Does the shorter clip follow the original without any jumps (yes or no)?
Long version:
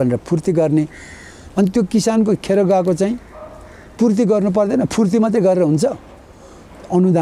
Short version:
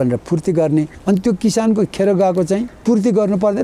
no